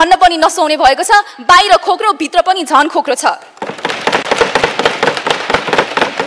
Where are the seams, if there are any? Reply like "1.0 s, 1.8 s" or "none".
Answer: none